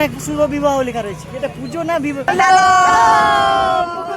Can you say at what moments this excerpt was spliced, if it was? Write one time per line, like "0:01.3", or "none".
0:02.2